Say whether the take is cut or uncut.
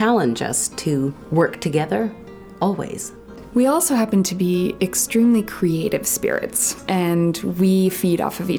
cut